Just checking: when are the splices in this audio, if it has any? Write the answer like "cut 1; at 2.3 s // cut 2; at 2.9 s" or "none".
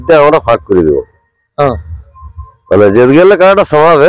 none